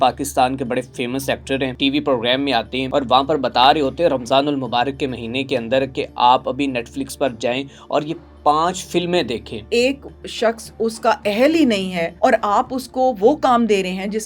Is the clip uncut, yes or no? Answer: no